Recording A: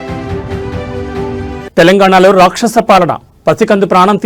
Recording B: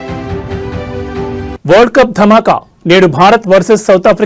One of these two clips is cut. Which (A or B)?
A